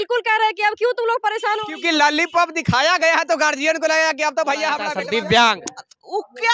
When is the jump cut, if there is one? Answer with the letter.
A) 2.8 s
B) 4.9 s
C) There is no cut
B